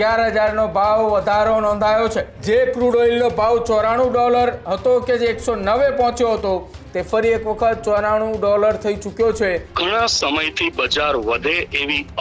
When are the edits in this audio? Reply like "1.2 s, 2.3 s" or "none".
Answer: 2.3 s, 9.7 s

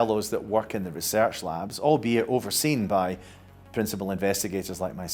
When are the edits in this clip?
none

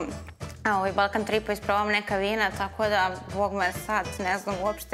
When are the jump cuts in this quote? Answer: none

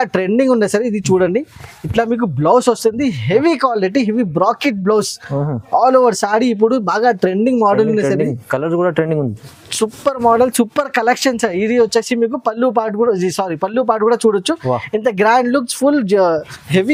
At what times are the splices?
none

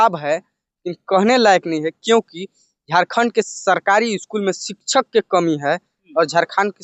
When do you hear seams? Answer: none

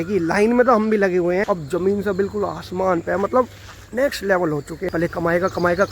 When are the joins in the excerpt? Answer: 1.6 s, 4.9 s

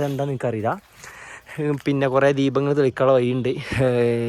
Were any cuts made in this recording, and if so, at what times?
none

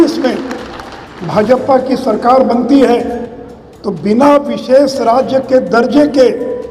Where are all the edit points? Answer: none

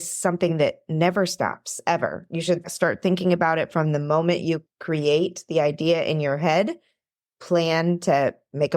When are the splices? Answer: 2.7 s, 4.7 s

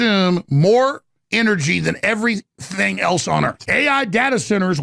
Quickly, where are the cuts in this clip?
3.6 s

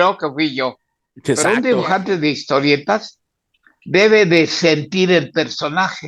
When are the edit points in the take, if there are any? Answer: 1.4 s

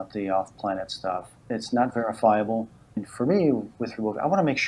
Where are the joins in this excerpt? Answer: 1.3 s, 3.1 s

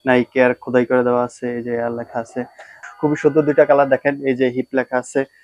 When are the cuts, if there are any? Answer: 2.8 s

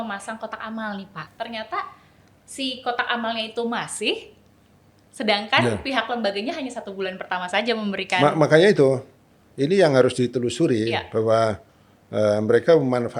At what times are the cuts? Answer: 1.3 s

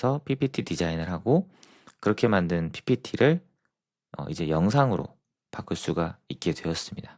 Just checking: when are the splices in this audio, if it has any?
none

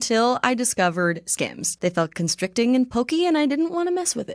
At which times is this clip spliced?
1.7 s

